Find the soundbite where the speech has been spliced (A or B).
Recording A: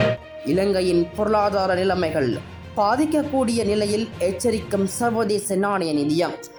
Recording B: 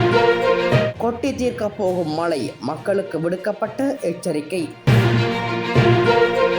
B